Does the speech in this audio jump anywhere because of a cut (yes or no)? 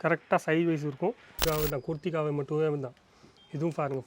yes